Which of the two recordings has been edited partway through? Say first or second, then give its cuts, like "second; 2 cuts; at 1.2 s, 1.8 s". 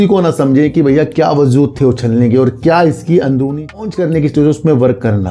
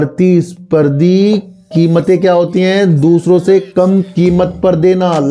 first; 1 cut; at 3.8 s